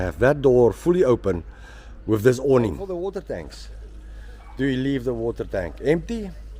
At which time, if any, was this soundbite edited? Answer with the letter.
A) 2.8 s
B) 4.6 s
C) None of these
A